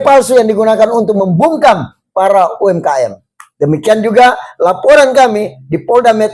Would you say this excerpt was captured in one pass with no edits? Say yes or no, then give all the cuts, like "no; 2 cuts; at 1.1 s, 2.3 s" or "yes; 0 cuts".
yes; 0 cuts